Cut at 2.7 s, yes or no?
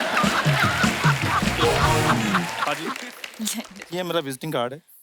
yes